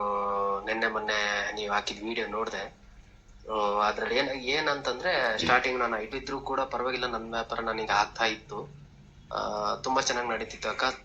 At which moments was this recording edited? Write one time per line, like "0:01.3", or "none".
0:06.1

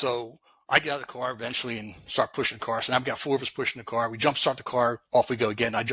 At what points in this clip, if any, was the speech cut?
none

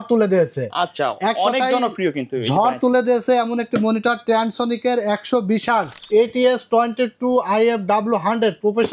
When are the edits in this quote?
0:06.0

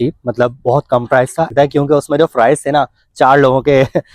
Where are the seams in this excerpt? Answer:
0:01.5

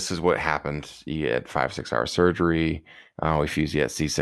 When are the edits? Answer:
none

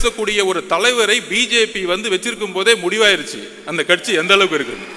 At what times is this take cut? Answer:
none

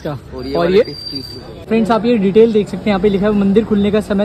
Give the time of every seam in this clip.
0:01.7

